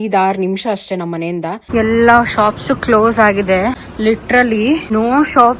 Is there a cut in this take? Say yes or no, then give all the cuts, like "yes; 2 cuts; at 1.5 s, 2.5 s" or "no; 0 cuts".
yes; 3 cuts; at 1.6 s, 3.9 s, 4.9 s